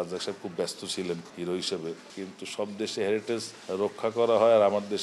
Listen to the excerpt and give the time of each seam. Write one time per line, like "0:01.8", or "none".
0:02.0